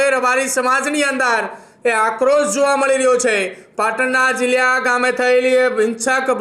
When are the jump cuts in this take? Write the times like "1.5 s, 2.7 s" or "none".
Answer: none